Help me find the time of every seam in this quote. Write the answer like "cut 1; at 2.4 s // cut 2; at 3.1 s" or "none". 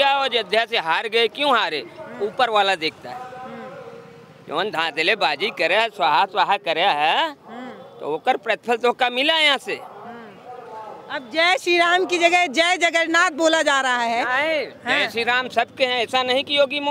none

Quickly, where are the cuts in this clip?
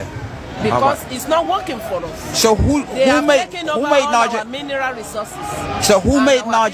none

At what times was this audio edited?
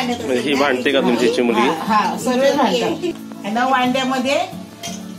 cut 1; at 3.2 s

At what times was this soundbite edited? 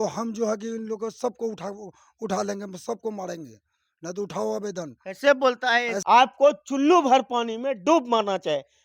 cut 1; at 5.9 s

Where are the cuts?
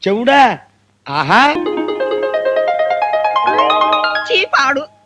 cut 1; at 1.6 s

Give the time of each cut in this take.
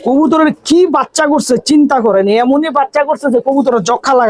none

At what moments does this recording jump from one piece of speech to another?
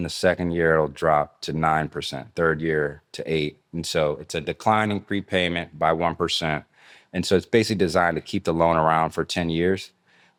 none

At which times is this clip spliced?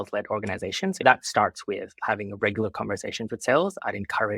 cut 1; at 1.0 s

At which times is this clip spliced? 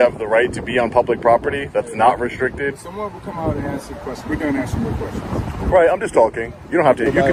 none

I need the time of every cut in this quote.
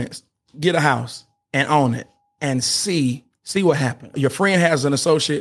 cut 1; at 3.3 s // cut 2; at 4.1 s

